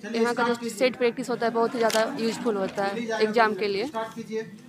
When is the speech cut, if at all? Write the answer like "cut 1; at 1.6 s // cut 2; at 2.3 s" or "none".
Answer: none